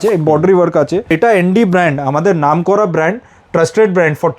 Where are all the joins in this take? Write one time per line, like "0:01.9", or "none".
0:01.1